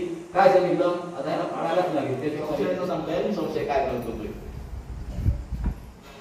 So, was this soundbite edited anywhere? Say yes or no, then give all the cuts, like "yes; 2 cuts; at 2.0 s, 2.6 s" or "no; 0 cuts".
yes; 1 cut; at 2.5 s